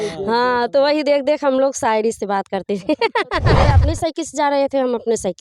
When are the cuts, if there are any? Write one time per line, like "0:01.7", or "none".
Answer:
0:03.8